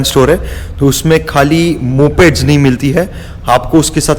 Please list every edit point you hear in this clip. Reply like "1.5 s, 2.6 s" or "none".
none